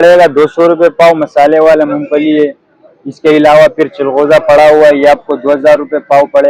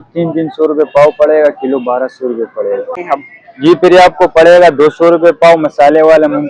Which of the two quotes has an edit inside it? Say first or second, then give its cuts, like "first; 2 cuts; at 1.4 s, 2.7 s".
second; 1 cut; at 3.1 s